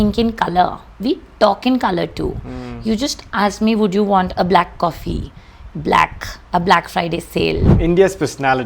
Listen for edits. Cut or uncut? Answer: cut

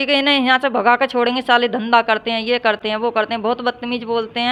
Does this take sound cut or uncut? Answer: uncut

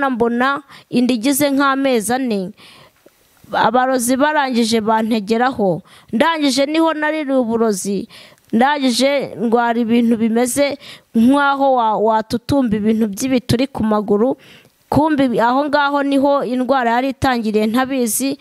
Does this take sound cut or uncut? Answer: uncut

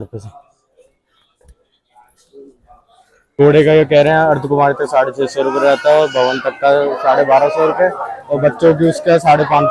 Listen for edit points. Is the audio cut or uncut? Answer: cut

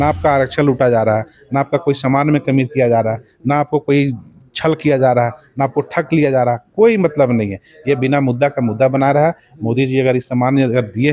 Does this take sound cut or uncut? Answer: uncut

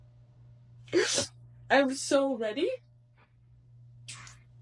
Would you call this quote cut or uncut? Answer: uncut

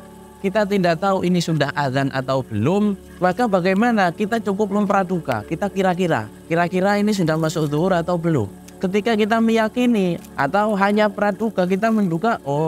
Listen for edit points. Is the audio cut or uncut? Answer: cut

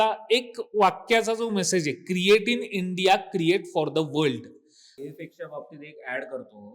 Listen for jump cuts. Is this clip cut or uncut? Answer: cut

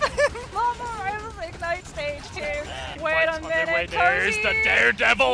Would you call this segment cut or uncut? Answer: cut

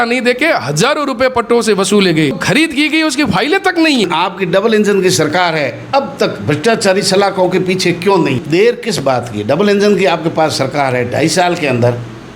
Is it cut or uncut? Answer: cut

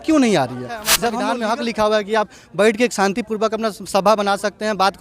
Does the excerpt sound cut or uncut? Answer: cut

